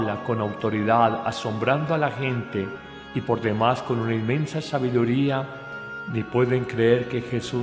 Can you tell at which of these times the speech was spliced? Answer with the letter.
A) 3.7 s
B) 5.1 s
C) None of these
A